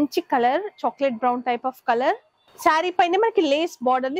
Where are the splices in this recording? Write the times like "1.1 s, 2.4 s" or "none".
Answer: 2.3 s